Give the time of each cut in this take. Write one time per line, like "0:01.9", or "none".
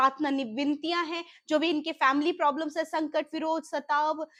none